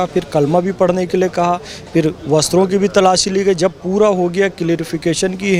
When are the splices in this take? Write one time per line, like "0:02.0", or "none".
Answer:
none